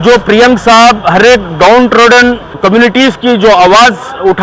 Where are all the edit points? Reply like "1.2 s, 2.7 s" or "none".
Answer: 2.6 s